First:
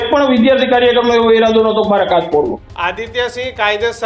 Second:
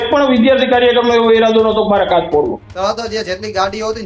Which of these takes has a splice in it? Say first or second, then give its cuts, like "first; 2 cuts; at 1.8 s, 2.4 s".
second; 1 cut; at 2.7 s